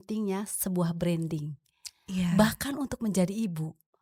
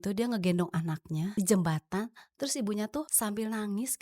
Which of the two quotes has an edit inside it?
second; 2 cuts; at 1.3 s, 3.1 s

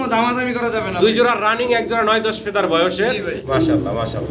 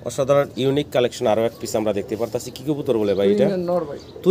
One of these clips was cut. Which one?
first; 1 cut; at 3.4 s

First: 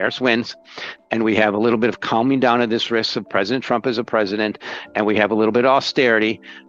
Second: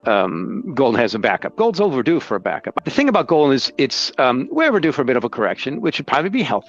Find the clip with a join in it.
second; 1 cut; at 2.8 s

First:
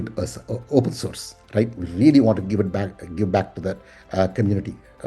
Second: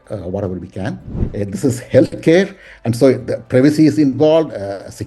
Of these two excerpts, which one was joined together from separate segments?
second; 1 cut; at 1.2 s

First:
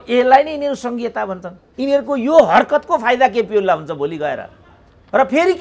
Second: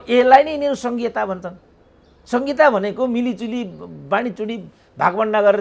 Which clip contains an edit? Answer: first; 1 cut; at 1.6 s

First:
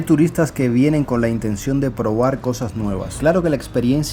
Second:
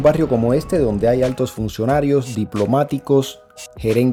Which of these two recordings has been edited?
first; 1 cut; at 3.0 s

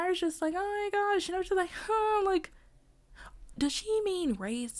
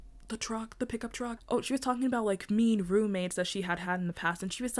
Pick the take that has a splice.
second; 1 cut; at 1.4 s

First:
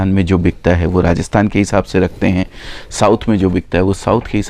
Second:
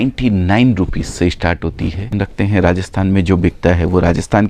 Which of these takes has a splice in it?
second; 1 cut; at 2.1 s

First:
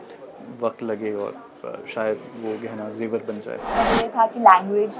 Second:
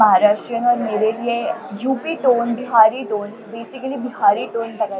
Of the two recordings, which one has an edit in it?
first; 1 cut; at 3.7 s

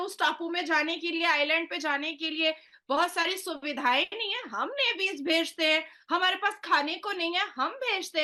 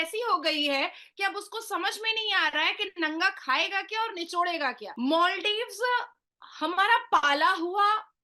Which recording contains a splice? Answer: second; 1 cut; at 4.8 s

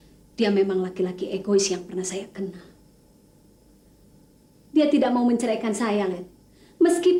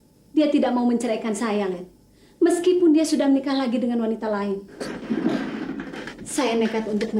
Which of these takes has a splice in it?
second; 1 cut; at 4.7 s

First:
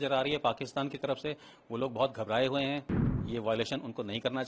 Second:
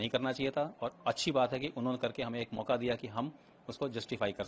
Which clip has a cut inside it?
first; 1 cut; at 3.2 s

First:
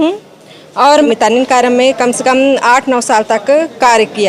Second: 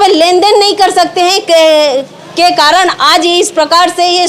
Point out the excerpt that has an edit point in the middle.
first; 1 cut; at 1.1 s

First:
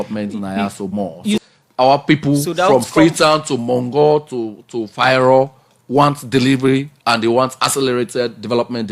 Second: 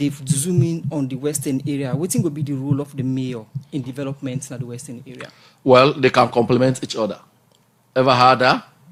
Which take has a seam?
first; 1 cut; at 1.4 s

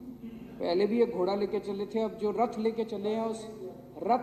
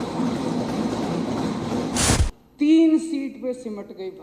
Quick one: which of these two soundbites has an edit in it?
second; 1 cut; at 2.2 s

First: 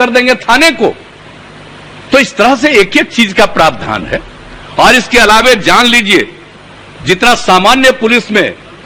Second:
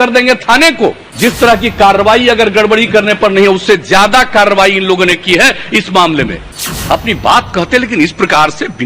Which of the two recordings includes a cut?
second; 2 cuts; at 1.1 s, 6.4 s

